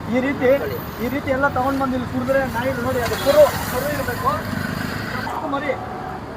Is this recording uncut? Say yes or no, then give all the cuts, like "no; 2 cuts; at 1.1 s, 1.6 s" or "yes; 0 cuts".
no; 1 cut; at 5.3 s